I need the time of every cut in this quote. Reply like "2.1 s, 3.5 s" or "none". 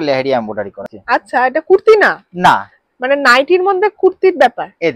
0.9 s